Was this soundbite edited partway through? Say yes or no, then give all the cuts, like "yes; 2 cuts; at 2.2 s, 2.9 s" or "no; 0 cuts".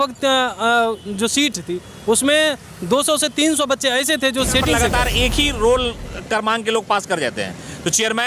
yes; 1 cut; at 4.8 s